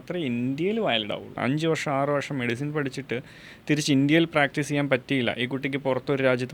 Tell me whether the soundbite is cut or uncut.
cut